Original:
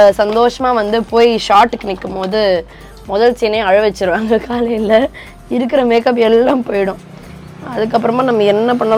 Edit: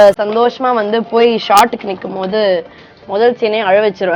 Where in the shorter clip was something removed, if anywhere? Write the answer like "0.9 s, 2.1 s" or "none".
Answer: none